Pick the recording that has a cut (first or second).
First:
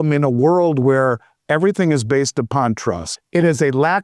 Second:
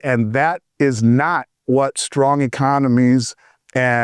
first